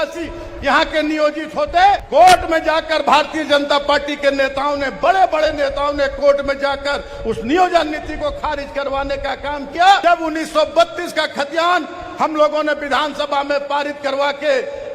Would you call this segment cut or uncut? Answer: cut